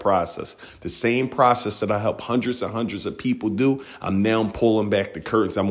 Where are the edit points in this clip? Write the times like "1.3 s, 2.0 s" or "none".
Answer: none